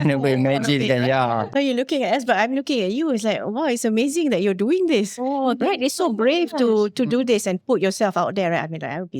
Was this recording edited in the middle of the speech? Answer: yes; 1 cut; at 1.5 s

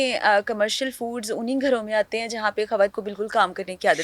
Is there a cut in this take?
yes; 1 cut; at 3.0 s

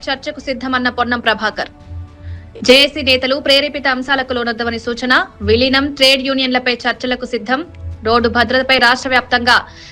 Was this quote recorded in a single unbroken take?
yes; 0 cuts

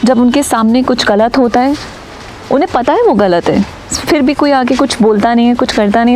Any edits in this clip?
no; 0 cuts

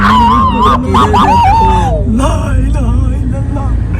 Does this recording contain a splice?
no; 0 cuts

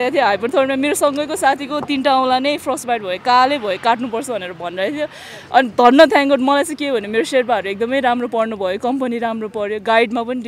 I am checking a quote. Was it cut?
no; 0 cuts

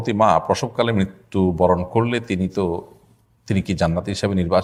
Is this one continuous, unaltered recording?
yes; 0 cuts

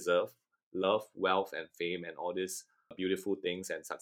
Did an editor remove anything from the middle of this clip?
yes; 1 cut; at 2.9 s

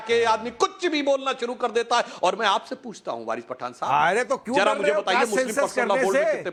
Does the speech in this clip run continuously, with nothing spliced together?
yes; 0 cuts

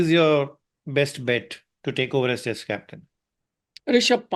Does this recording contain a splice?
no; 0 cuts

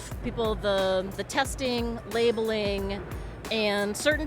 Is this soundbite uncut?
no; 1 cut; at 1.2 s

